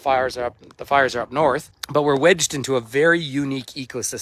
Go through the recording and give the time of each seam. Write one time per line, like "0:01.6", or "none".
0:01.7